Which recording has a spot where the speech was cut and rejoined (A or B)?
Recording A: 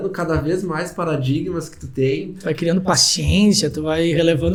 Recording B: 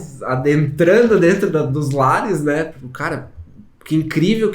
B